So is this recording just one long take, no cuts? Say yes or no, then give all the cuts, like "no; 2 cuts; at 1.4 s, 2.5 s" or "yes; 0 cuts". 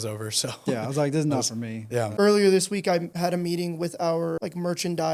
no; 3 cuts; at 2.1 s, 3.1 s, 4.4 s